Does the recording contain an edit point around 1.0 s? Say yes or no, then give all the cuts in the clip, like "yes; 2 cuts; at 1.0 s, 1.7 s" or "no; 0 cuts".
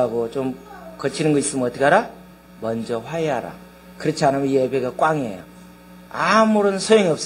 no; 0 cuts